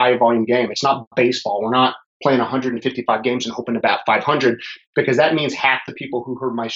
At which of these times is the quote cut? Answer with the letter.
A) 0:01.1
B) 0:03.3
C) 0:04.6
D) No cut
D